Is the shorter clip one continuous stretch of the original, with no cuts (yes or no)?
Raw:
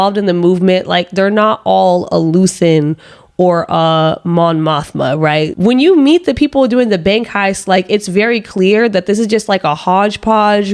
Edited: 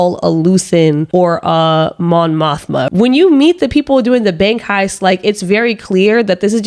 no